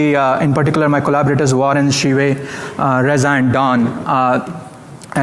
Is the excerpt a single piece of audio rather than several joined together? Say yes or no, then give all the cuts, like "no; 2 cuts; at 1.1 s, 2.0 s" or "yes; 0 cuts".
yes; 0 cuts